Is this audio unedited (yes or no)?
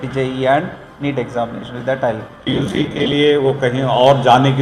no